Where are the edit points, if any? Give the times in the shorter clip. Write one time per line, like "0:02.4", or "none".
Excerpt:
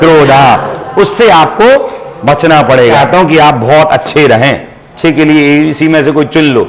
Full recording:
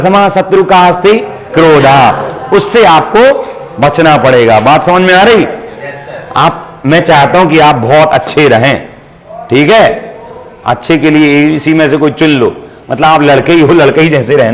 0:03.0
0:04.8